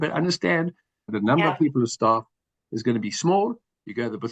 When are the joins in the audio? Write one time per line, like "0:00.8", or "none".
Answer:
0:01.2